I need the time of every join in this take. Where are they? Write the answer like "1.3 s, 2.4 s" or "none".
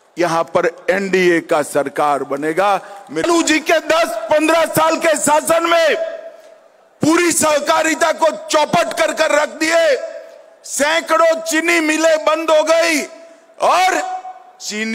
3.2 s